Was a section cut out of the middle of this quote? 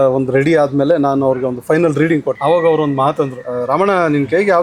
yes; 2 cuts; at 2.3 s, 3.4 s

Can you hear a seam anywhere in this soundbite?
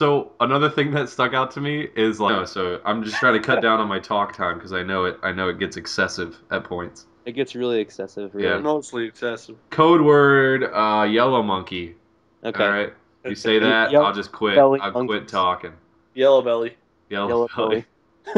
no; 0 cuts

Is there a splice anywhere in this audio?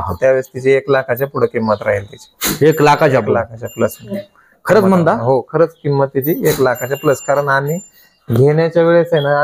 no; 0 cuts

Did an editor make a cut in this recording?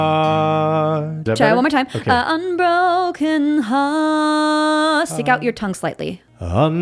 yes; 1 cut; at 1.2 s

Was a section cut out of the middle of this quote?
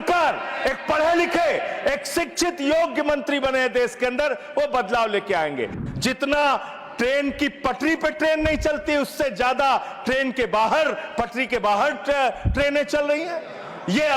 yes; 1 cut; at 5.8 s

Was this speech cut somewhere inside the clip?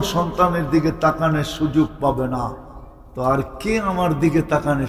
no; 0 cuts

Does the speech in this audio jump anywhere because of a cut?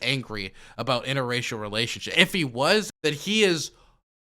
yes; 1 cut; at 2.9 s

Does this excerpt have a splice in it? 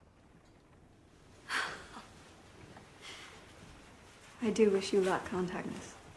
no; 0 cuts

